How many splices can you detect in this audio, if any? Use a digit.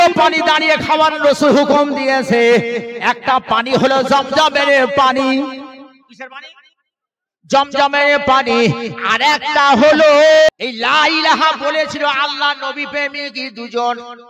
1